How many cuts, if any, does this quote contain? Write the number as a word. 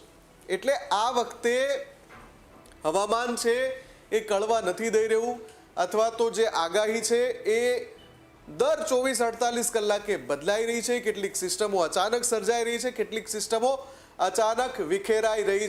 zero